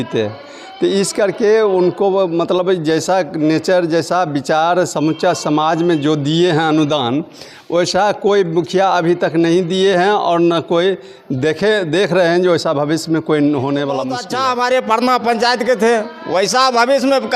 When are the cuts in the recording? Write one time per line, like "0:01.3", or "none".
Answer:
0:14.2